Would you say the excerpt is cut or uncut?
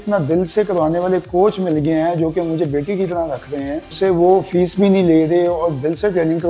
cut